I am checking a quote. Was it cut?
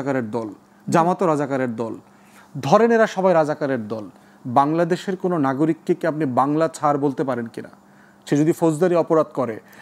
no; 0 cuts

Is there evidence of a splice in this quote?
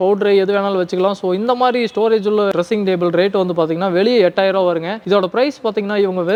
no; 0 cuts

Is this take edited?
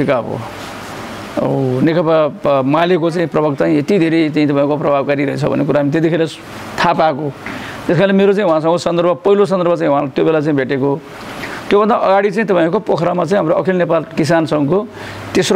no; 0 cuts

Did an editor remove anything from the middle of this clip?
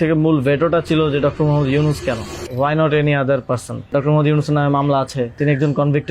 yes; 3 cuts; at 2.4 s, 3.9 s, 5.4 s

